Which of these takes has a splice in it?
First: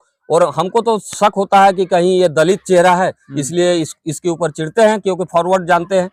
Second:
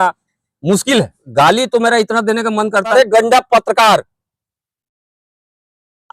second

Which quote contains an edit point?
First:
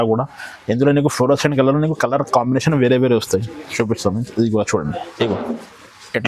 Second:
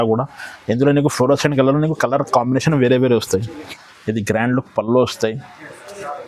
second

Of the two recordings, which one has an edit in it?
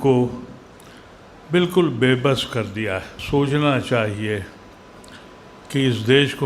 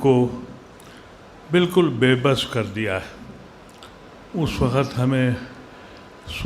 first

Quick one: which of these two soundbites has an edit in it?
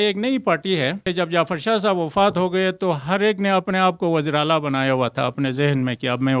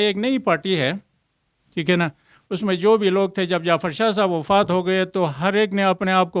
first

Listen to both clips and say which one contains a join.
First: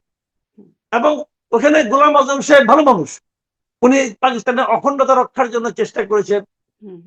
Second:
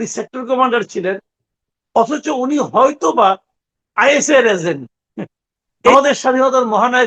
second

